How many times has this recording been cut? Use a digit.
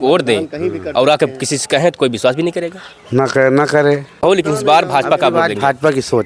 1